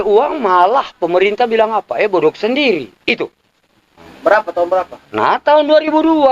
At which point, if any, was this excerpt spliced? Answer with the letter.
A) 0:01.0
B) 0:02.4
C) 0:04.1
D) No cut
C